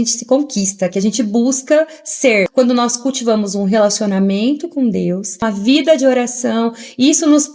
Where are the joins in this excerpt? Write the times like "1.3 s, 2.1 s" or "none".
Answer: 2.5 s, 5.5 s